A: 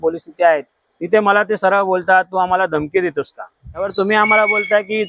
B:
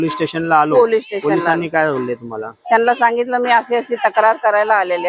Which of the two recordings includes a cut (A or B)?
A